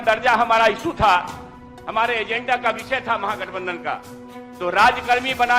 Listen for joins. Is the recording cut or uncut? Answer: uncut